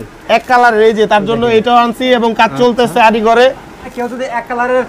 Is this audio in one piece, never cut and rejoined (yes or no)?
no